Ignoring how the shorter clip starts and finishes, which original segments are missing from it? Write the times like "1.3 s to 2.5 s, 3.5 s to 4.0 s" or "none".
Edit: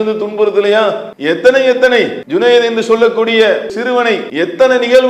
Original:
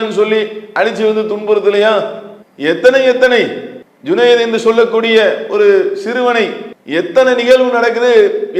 2.2 s to 2.5 s, 3.6 s to 3.9 s, 5.6 s to 6.4 s